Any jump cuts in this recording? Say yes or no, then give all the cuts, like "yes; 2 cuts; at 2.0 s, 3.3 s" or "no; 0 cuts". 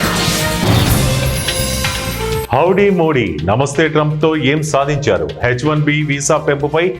yes; 1 cut; at 2.4 s